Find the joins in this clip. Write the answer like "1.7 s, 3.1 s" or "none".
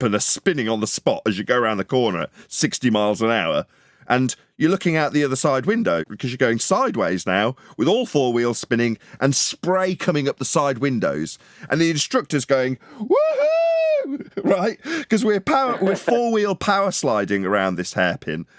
6.1 s